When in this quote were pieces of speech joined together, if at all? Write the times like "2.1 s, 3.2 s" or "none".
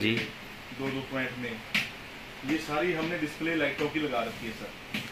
none